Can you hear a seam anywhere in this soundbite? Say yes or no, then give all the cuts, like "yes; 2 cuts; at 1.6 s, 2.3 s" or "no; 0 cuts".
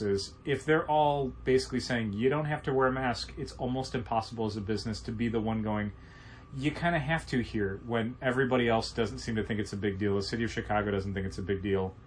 no; 0 cuts